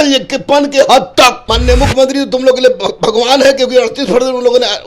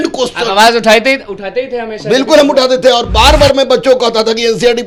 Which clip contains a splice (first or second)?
first